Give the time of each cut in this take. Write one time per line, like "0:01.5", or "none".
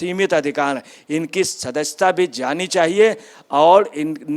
none